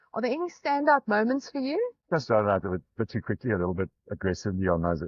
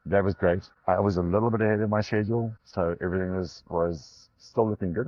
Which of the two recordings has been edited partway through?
first; 1 cut; at 2.0 s

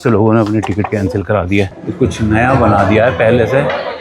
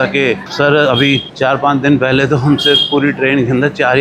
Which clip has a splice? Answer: first; 1 cut; at 1.7 s

